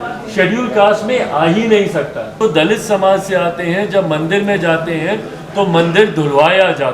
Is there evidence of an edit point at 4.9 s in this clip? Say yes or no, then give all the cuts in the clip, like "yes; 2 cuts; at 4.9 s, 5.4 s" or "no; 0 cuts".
no; 1 cut; at 2.3 s